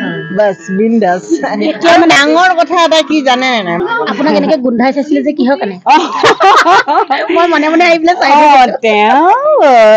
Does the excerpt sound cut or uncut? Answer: cut